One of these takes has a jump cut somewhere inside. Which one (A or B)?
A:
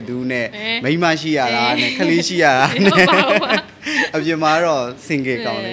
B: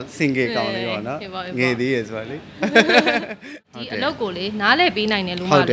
B